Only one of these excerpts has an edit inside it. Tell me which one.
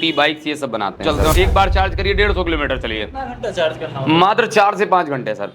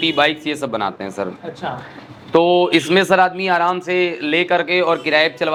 first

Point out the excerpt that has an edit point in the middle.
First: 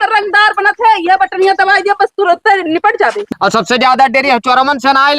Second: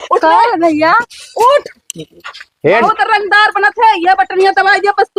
first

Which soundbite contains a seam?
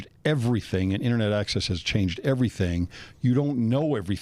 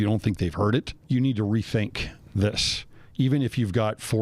second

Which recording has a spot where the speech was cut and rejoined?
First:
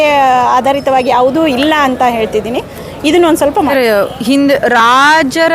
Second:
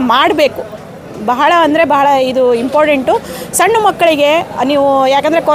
first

